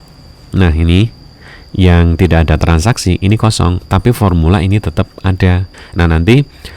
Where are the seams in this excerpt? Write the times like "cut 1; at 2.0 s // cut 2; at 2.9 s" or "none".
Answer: cut 1; at 5.7 s